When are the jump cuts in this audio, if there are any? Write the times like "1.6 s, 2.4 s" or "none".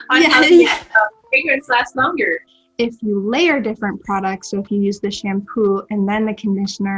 2.6 s